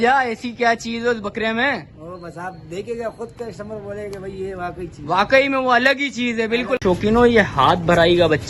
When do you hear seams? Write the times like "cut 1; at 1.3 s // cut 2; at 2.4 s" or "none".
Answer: cut 1; at 6.8 s

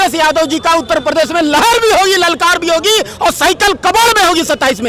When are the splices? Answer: none

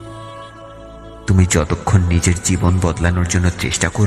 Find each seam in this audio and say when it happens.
cut 1; at 1.2 s

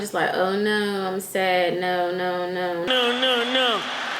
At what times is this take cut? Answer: cut 1; at 2.9 s

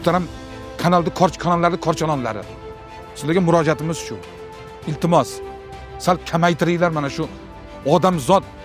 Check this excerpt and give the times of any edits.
none

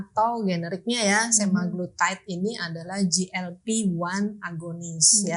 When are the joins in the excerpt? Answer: none

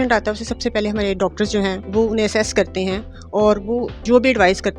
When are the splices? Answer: cut 1; at 1.8 s // cut 2; at 3.9 s

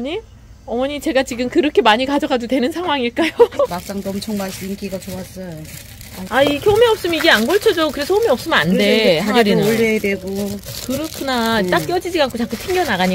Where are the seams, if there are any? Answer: cut 1; at 3.7 s // cut 2; at 6.2 s

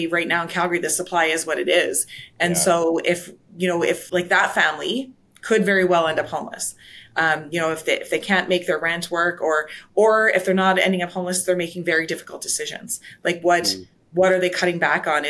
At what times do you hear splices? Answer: none

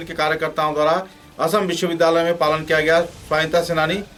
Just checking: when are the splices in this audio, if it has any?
none

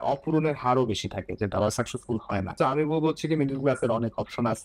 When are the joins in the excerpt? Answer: cut 1; at 2.5 s

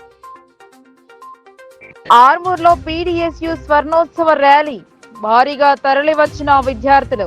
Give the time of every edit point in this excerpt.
cut 1; at 1.7 s

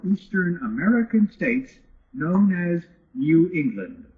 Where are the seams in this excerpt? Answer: none

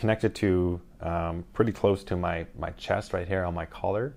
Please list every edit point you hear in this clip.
none

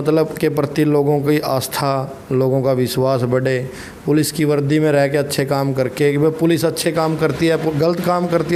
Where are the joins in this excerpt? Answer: none

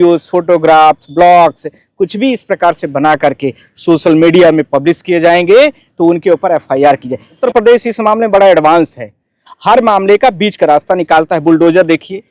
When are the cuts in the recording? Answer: cut 1; at 7.4 s

